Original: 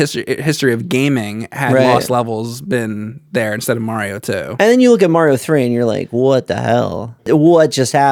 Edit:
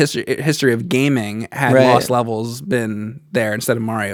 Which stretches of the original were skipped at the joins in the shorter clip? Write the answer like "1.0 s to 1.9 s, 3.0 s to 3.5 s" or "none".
none